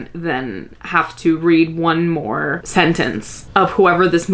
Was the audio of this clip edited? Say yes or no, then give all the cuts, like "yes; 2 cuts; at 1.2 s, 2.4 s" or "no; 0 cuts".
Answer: no; 0 cuts